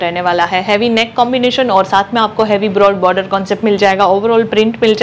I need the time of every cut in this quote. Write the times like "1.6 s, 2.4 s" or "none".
none